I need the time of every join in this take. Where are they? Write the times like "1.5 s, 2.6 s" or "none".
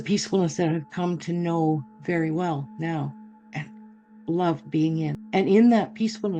5.2 s